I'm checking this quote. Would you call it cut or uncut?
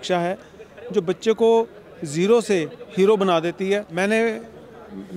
cut